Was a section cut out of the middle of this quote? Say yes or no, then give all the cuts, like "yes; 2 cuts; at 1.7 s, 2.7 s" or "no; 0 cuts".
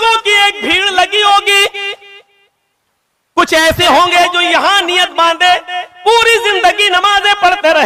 no; 0 cuts